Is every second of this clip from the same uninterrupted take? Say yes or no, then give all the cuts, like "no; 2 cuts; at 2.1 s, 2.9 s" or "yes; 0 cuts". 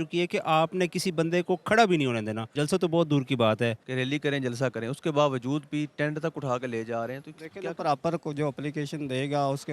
no; 2 cuts; at 2.4 s, 3.9 s